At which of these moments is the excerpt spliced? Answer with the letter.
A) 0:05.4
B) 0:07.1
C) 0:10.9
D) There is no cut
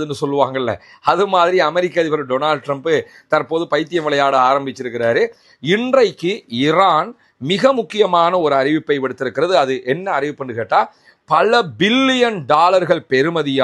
A